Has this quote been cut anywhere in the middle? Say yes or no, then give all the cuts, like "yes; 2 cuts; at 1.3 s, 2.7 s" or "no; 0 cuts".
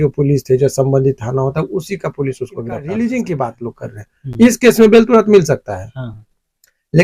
yes; 1 cut; at 2.8 s